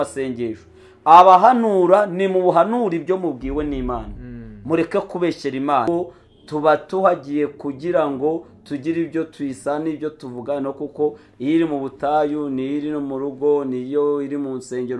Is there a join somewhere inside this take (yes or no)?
yes